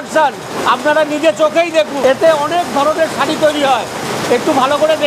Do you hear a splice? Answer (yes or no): yes